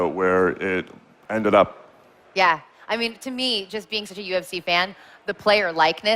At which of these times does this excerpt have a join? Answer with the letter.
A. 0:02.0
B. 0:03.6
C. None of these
B